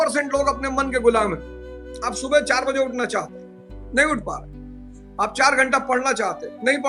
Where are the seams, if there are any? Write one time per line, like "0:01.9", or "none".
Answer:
none

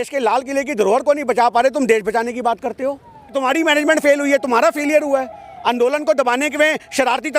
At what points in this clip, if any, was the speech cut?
0:03.4

